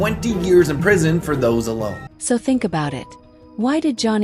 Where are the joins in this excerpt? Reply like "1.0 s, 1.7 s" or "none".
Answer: none